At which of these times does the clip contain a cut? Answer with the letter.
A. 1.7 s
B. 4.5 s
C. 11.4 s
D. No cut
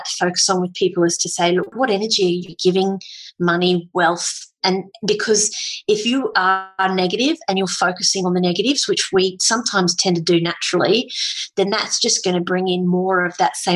A